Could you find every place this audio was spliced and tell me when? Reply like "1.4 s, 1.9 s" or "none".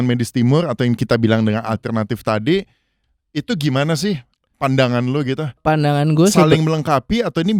none

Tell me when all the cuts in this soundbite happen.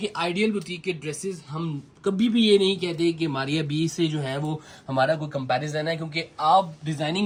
none

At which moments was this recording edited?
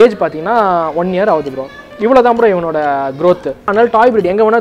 3.7 s

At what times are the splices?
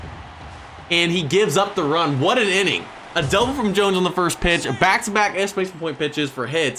none

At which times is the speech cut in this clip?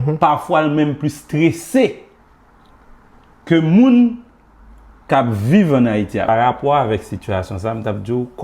6.3 s

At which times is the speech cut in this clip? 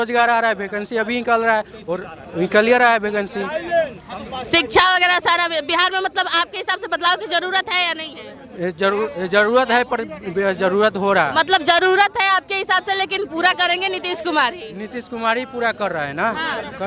none

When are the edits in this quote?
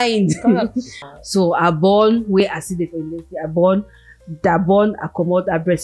1.0 s

